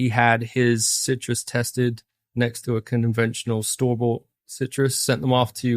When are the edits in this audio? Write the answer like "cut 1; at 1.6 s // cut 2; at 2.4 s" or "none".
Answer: cut 1; at 0.9 s